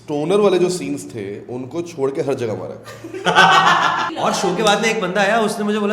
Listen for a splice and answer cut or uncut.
cut